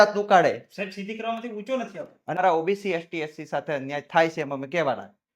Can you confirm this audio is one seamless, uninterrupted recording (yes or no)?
no